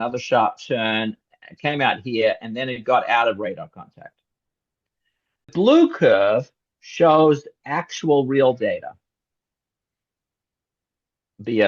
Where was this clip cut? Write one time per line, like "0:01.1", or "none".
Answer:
0:05.5